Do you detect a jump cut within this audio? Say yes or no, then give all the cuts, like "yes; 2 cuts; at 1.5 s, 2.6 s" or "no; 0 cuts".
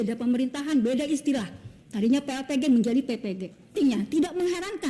yes; 1 cut; at 3.8 s